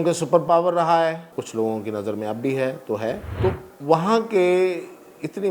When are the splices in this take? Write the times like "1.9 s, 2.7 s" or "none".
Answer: 1.3 s, 3.3 s